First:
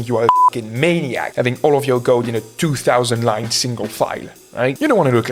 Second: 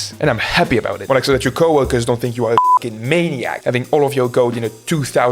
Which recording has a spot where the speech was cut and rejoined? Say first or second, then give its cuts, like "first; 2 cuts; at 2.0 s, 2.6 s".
second; 1 cut; at 1.0 s